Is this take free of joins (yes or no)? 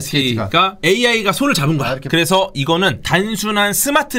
no